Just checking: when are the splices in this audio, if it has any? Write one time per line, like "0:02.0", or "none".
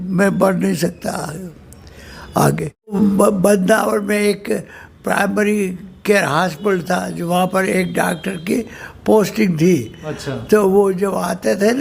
0:02.9